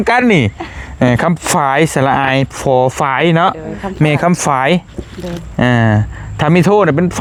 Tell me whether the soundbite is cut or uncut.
uncut